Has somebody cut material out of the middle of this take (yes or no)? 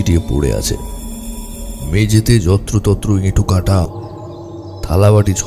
yes